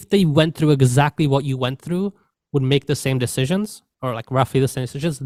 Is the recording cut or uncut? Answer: uncut